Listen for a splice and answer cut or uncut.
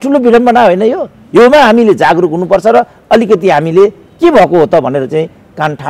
uncut